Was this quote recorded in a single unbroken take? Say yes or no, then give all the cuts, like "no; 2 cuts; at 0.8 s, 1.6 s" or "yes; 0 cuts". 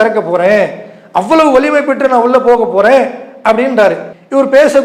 yes; 0 cuts